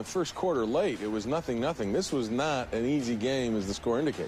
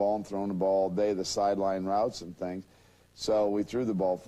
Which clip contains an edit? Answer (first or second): second